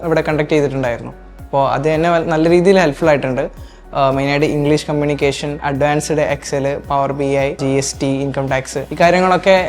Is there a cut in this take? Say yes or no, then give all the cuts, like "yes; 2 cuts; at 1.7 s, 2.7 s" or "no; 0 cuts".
no; 0 cuts